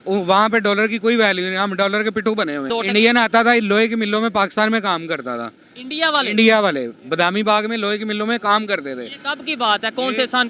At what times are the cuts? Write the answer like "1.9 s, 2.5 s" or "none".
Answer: 2.7 s